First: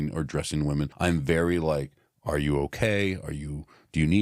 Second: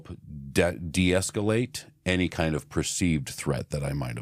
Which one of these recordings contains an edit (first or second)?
first